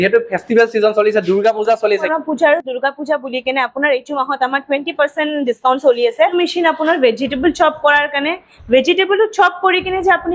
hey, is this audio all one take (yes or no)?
no